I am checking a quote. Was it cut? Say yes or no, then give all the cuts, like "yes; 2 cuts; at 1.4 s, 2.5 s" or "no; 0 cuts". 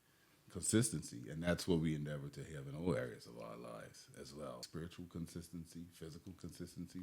yes; 1 cut; at 4.7 s